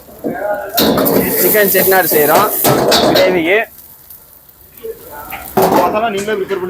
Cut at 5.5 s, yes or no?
no